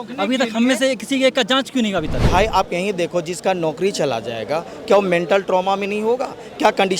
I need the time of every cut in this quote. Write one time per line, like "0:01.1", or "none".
0:02.2